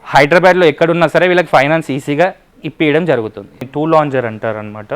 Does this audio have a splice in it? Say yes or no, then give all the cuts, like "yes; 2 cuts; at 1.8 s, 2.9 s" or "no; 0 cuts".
yes; 1 cut; at 3.6 s